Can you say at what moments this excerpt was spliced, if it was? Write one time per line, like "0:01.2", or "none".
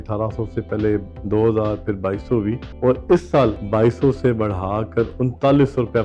0:01.1
0:02.7
0:03.6